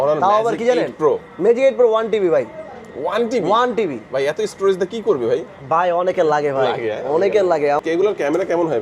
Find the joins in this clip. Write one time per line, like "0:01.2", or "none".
0:07.8